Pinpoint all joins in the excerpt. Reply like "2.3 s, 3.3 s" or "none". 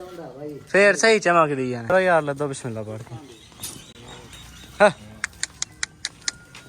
1.8 s